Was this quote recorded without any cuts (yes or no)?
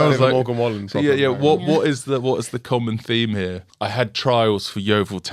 no